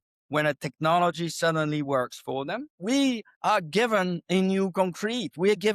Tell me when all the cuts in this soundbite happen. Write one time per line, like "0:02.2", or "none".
0:02.7
0:03.3